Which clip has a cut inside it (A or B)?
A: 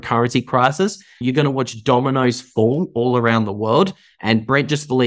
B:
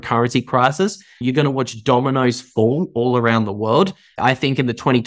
B